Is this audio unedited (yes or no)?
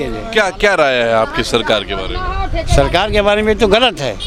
yes